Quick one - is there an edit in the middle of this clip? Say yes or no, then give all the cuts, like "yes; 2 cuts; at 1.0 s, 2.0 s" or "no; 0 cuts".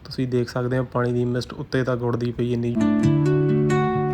yes; 1 cut; at 2.8 s